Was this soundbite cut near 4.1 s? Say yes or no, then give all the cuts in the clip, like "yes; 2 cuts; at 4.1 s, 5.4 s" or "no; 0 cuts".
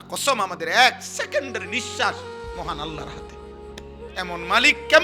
yes; 2 cuts; at 3.1 s, 4.1 s